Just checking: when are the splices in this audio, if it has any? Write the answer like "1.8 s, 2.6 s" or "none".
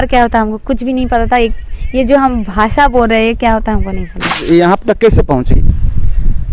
4.4 s